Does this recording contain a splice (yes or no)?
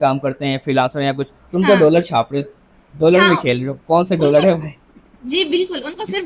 no